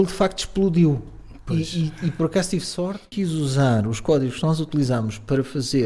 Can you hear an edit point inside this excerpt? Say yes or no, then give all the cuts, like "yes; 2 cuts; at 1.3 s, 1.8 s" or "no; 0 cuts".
yes; 1 cut; at 3.1 s